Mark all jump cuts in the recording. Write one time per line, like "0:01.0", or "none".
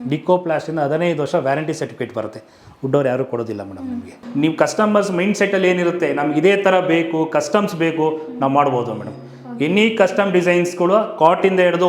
0:04.2